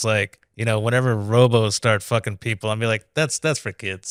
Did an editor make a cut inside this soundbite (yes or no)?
no